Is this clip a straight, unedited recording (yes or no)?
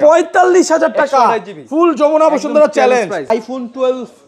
no